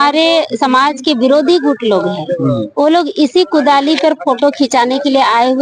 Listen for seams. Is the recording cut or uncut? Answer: uncut